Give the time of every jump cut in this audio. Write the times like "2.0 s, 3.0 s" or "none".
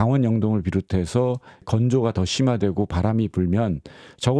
1.6 s

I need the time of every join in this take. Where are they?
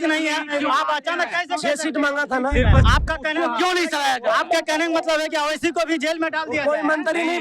2.9 s

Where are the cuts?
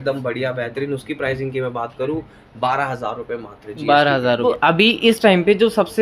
4.5 s

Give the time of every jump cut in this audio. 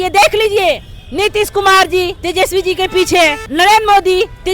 2.2 s, 3.4 s

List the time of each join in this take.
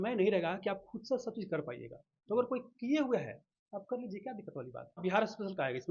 5.0 s

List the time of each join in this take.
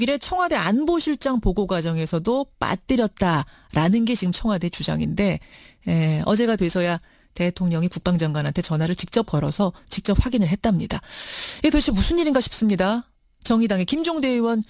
3.3 s

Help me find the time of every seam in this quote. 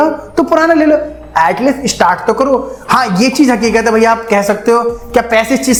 none

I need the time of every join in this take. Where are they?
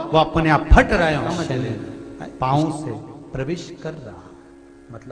1.4 s

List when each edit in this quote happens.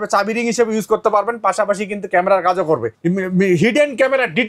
2.9 s

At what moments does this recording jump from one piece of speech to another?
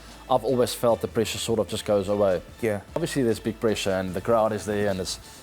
3.0 s

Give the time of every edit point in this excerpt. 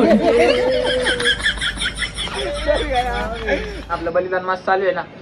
3.9 s

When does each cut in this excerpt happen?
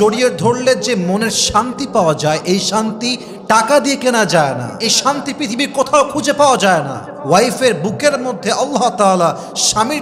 none

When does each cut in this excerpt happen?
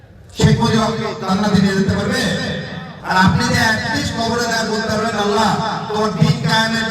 2.9 s

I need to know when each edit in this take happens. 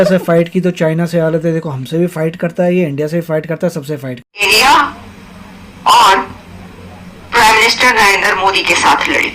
4.3 s

